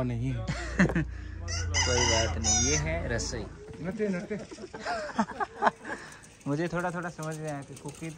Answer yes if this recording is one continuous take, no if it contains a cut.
no